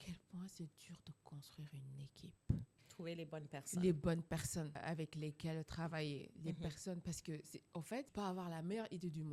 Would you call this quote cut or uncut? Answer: cut